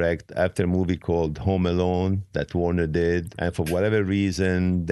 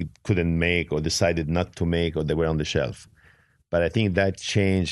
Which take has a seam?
first; 1 cut; at 3.3 s

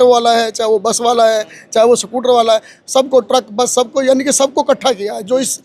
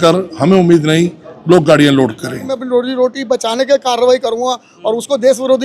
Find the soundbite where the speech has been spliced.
second; 1 cut; at 2.6 s

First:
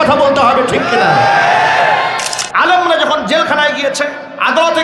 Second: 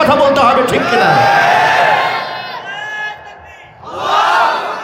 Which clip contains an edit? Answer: first; 1 cut; at 2.4 s

